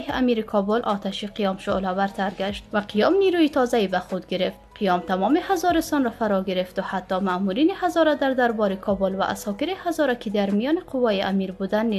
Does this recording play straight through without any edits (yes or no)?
yes